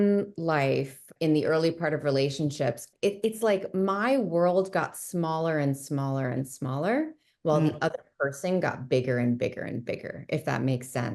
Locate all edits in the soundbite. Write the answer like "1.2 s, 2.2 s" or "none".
1.1 s, 2.9 s